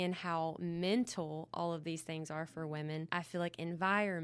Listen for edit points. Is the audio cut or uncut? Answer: cut